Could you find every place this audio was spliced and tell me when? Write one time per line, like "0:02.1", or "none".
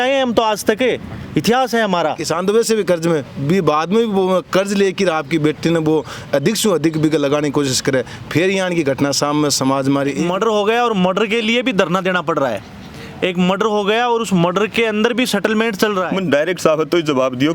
0:02.2
0:10.2
0:16.1